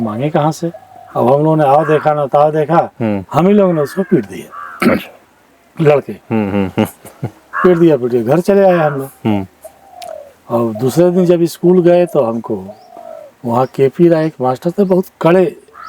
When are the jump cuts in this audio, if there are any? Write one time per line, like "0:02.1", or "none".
0:01.0